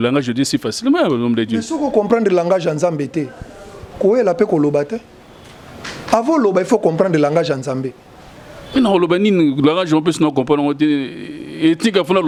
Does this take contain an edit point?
no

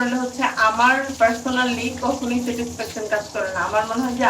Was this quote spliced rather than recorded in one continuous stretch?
no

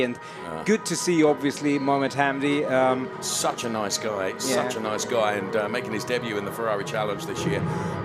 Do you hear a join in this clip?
no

